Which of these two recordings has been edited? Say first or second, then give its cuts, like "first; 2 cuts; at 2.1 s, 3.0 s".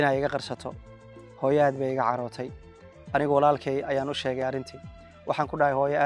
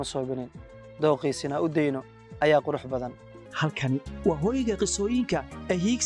second; 1 cut; at 3.4 s